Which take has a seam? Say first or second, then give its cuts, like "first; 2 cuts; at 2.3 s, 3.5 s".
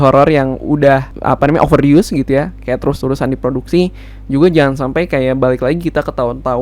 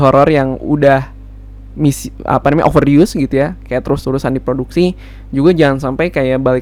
first; 1 cut; at 1.1 s